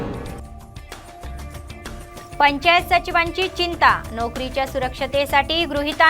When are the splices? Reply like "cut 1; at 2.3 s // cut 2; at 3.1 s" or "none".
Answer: cut 1; at 1.5 s